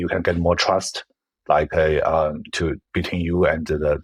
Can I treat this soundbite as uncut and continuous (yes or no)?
yes